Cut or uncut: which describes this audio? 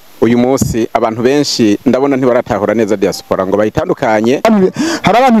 cut